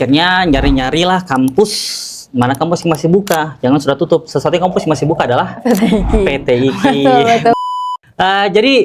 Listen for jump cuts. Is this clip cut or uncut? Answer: cut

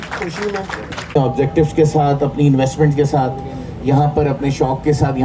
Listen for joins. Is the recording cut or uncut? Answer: cut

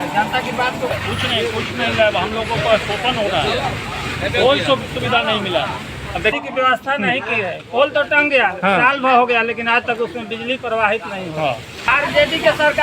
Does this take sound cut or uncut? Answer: cut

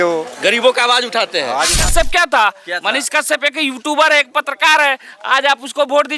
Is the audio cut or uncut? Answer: cut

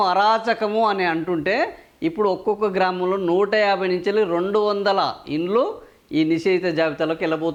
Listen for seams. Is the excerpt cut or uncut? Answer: uncut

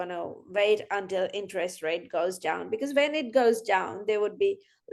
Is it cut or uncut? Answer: uncut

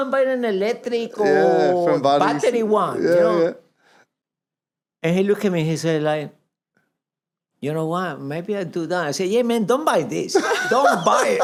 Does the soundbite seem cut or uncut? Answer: uncut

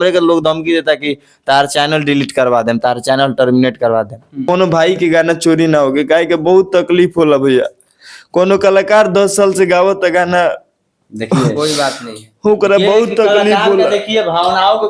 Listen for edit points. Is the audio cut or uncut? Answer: cut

